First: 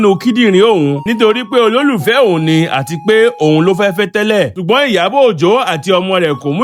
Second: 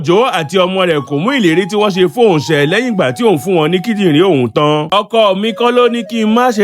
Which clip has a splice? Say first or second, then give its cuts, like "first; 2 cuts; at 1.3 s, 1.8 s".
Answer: second; 1 cut; at 4.9 s